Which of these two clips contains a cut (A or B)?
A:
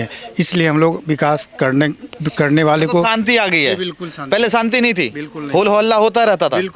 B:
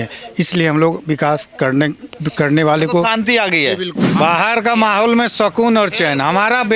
B